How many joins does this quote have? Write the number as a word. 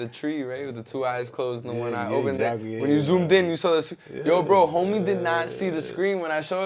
zero